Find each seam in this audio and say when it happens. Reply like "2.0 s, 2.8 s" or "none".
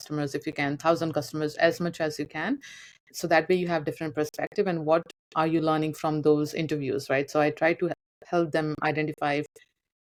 none